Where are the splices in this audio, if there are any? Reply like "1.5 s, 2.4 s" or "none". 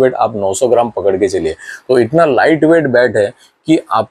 none

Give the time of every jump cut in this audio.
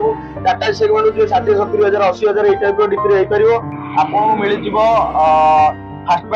3.7 s

